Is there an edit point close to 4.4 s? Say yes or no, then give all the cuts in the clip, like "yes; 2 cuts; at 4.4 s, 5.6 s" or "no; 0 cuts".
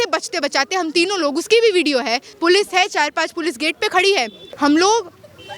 yes; 2 cuts; at 2.3 s, 4.4 s